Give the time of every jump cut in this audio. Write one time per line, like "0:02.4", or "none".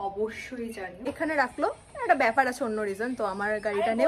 0:01.0